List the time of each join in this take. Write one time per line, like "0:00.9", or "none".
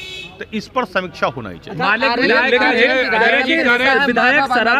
none